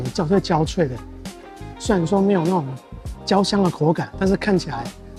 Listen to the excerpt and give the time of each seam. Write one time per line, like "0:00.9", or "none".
none

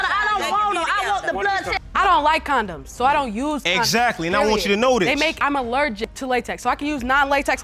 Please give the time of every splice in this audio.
0:01.8

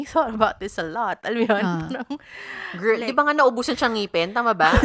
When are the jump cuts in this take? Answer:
none

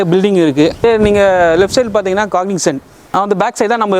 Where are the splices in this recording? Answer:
0:00.8
0:02.9

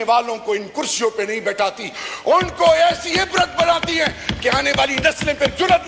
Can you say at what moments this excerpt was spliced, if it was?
none

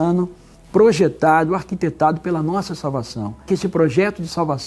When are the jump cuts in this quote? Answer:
0:03.5

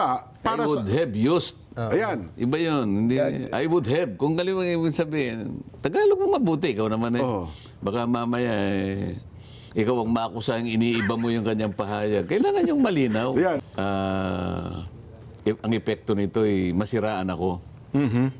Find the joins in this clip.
0:13.6

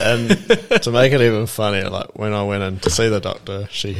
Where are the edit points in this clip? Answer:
none

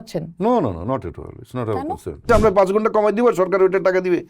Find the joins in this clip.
0:02.2

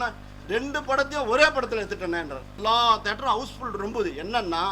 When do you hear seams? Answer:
0:02.6

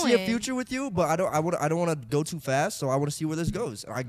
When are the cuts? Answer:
none

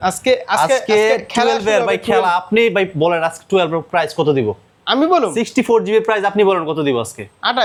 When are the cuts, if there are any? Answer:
none

